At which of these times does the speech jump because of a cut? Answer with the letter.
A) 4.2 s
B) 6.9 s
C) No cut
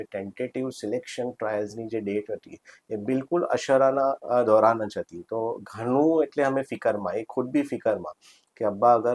A